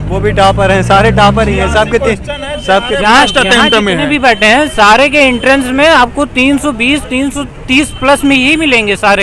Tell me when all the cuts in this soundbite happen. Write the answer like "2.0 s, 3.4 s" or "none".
none